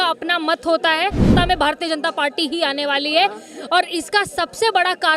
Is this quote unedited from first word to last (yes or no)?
no